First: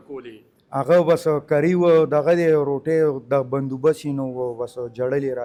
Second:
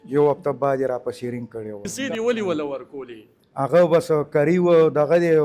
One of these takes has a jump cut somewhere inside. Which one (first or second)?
second